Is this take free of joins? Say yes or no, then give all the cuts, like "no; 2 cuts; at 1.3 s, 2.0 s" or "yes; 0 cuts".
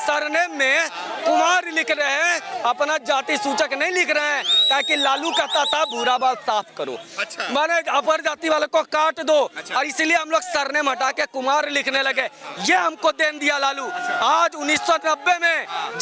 yes; 0 cuts